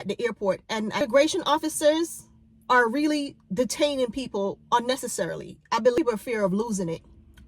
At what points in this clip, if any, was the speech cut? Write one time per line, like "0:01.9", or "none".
0:01.0
0:06.0